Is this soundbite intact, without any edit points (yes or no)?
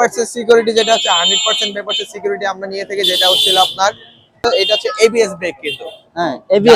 no